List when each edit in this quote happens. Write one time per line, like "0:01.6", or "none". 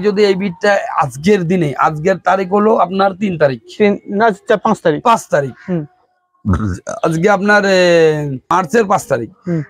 0:08.5